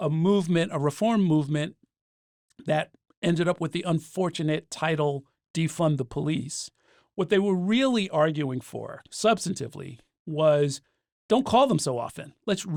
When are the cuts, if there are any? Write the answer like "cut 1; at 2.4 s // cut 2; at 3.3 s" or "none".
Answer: none